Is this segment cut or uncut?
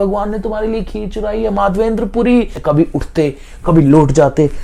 cut